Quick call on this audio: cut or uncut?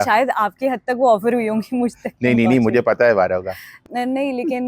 cut